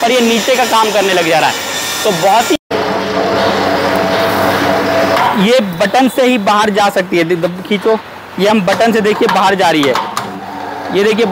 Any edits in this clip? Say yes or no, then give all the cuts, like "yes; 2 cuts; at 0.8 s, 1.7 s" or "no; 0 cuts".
yes; 1 cut; at 2.6 s